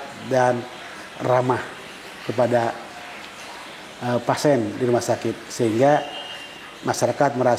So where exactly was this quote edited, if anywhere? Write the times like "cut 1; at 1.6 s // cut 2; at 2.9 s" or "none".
none